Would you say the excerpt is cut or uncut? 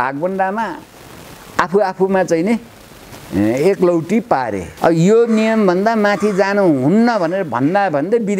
cut